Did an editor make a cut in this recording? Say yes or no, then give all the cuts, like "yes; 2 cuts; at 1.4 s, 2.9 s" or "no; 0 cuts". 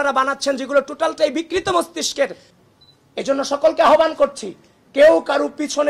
yes; 1 cut; at 2.4 s